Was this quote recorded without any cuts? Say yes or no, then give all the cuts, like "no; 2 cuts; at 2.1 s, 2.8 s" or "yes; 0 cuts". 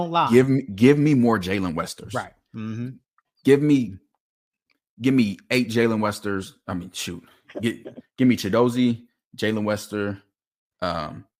yes; 0 cuts